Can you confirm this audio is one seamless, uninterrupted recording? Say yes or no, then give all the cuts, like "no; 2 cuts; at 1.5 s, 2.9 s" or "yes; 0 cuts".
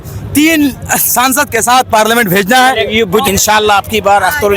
yes; 0 cuts